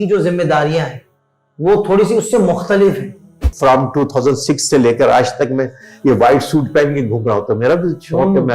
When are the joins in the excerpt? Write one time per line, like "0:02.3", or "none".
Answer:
0:03.5